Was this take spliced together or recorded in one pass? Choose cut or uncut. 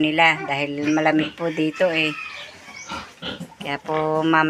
uncut